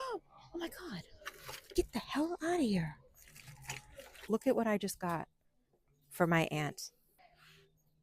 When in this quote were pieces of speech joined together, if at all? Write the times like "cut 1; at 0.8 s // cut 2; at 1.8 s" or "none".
cut 1; at 4.1 s // cut 2; at 7.1 s